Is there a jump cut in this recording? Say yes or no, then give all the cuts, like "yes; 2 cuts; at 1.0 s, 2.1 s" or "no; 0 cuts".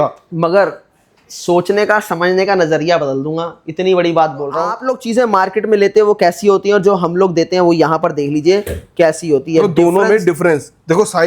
yes; 1 cut; at 4.8 s